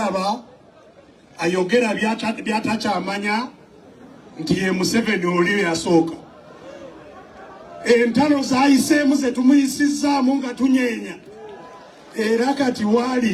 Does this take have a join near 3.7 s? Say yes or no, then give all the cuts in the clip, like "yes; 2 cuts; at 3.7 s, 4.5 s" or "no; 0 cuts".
no; 0 cuts